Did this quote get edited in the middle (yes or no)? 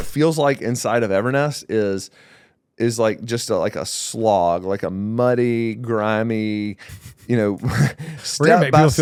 no